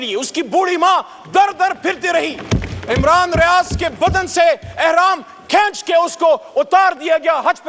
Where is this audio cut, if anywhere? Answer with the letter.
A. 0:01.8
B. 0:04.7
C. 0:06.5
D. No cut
D